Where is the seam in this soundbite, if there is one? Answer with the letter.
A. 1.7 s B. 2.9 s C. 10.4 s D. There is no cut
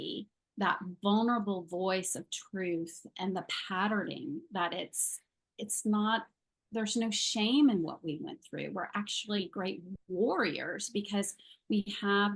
D